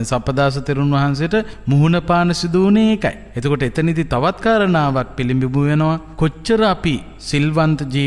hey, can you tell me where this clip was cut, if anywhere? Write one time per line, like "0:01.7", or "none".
0:01.6
0:03.3
0:06.1
0:07.1